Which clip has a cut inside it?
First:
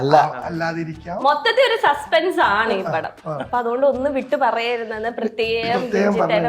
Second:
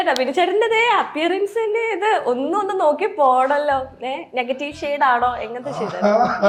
first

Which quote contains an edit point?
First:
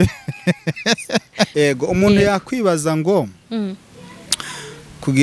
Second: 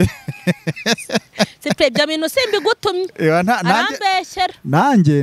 first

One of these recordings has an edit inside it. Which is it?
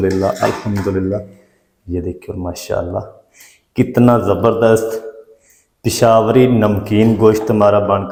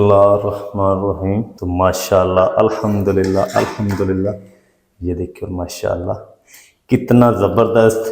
second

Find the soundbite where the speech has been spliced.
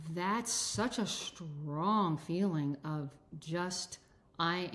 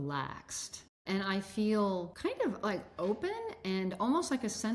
second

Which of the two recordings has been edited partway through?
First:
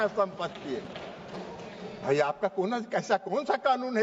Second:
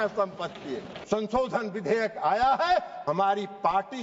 second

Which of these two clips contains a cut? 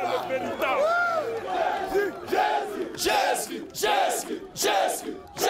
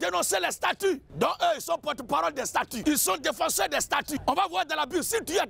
second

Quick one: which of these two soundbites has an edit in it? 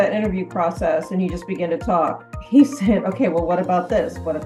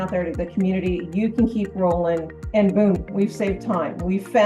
second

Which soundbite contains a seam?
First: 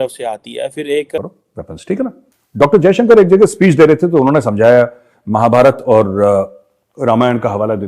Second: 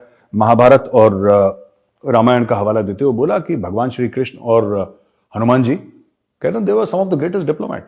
first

